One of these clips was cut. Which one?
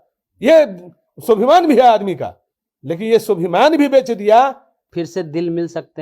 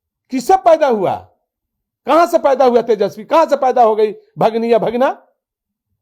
first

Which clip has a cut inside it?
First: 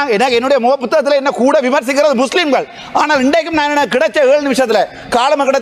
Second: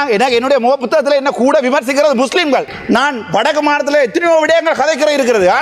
second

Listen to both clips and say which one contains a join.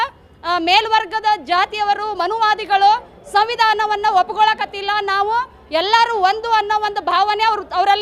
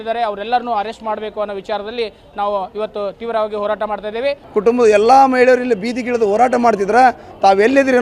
second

